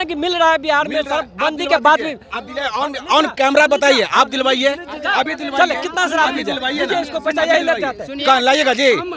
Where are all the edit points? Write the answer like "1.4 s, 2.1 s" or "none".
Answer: none